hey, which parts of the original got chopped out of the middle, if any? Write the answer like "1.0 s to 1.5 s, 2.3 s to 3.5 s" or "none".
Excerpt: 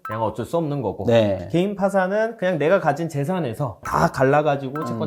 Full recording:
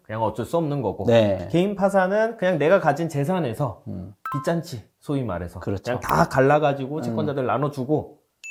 3.8 s to 6.0 s